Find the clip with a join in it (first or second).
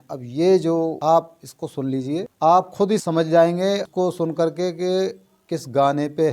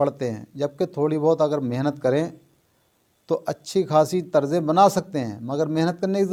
first